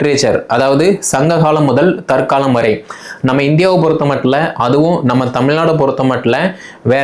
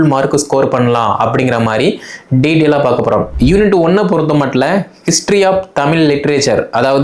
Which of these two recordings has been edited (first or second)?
second